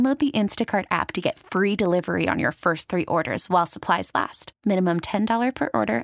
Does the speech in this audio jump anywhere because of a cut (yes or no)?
no